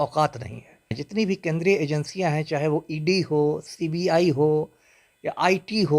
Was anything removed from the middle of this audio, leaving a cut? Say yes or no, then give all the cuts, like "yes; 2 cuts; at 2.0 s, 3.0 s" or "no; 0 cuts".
yes; 1 cut; at 1.0 s